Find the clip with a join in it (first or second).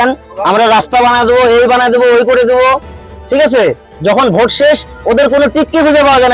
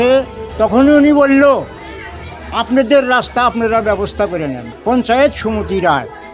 second